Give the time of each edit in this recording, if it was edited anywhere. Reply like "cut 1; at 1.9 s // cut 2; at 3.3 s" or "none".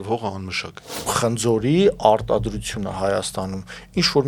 cut 1; at 1.1 s